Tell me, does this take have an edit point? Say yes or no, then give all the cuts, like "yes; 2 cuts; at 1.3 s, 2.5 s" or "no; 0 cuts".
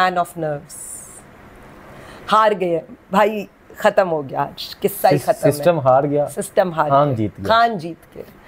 no; 0 cuts